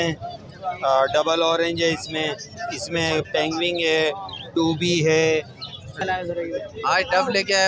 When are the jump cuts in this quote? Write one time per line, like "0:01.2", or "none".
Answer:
0:06.0